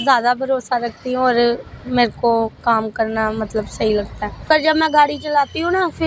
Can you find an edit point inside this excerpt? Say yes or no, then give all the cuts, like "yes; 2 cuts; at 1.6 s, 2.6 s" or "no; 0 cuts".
yes; 1 cut; at 4.5 s